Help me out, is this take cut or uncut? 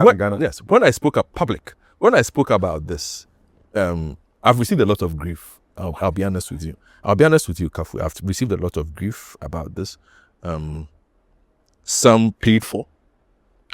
uncut